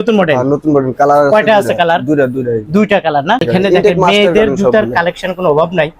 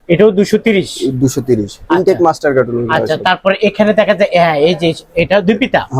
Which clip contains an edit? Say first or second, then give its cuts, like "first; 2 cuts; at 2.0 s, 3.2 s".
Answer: first; 1 cut; at 3.4 s